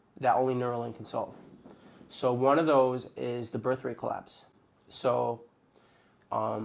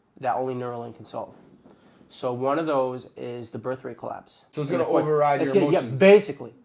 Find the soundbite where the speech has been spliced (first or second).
second